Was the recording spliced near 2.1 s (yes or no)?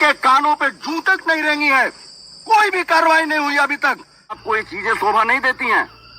no